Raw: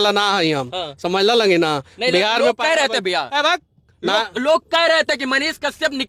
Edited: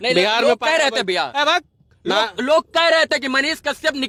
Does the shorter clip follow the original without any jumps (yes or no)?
yes